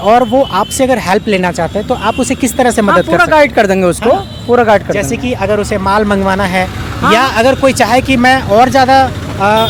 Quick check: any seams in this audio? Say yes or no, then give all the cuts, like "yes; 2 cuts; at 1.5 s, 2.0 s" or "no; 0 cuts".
no; 0 cuts